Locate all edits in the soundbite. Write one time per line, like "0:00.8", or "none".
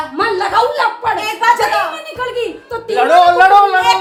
none